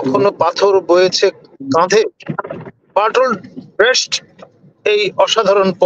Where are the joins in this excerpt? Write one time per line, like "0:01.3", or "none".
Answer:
none